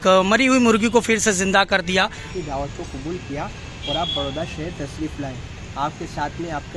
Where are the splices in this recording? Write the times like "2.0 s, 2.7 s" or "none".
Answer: 2.2 s